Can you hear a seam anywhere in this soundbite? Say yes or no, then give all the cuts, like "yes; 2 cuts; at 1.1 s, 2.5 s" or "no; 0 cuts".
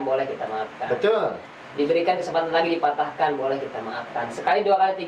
no; 0 cuts